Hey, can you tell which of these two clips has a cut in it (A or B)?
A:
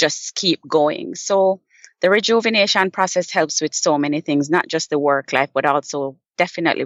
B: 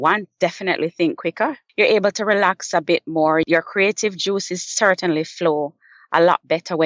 B